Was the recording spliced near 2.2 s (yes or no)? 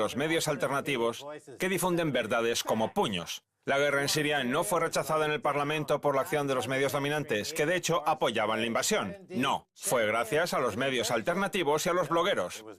no